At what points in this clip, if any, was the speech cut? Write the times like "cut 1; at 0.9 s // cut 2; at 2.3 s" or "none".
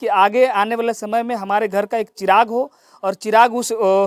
none